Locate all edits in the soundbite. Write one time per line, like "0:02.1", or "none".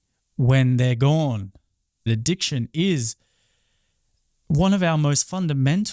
0:02.1

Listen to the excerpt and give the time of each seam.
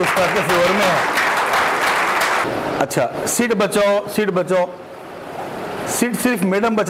0:02.4

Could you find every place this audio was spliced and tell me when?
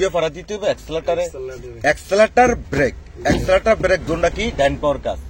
none

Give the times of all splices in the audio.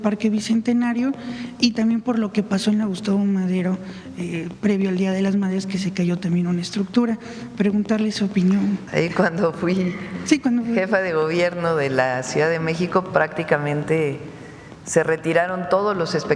0:08.8

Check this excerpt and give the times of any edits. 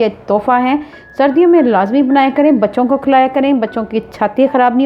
none

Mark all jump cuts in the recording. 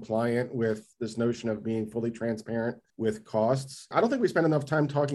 0:00.9
0:02.9
0:03.9

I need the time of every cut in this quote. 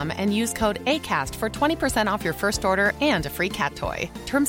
none

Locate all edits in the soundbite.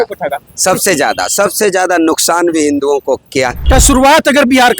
0:03.6

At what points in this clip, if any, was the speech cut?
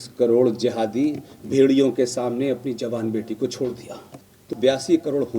0:04.4

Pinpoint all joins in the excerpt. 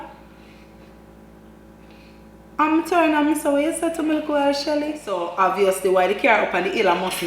0:05.2

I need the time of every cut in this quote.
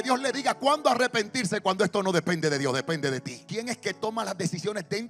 0:03.4

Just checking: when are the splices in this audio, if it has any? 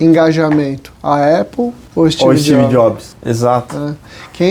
0:01.8
0:03.1

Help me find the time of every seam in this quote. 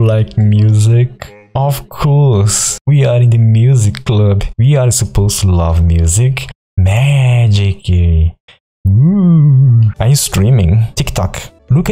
0:06.4
0:09.9

